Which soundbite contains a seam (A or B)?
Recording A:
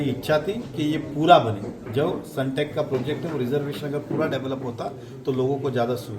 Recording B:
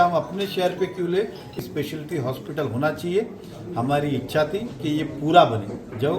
B